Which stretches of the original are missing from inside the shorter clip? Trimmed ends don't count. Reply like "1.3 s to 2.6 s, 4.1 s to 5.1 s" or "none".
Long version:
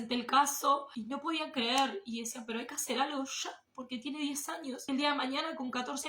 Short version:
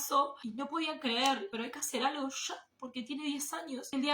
2.0 s to 2.5 s